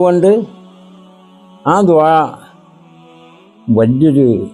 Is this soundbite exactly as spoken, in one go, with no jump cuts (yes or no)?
yes